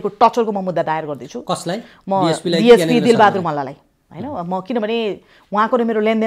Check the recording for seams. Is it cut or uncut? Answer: uncut